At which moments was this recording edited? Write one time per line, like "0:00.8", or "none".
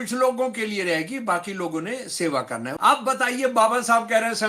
0:02.7